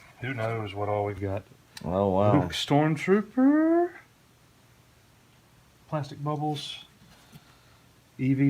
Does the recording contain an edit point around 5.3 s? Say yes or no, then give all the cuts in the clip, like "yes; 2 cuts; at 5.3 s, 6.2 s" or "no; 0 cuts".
yes; 1 cut; at 5.3 s